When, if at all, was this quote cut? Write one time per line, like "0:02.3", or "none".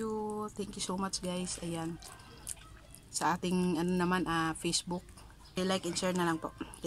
0:05.6